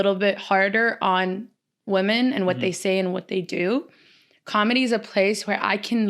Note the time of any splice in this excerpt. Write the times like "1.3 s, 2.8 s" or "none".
none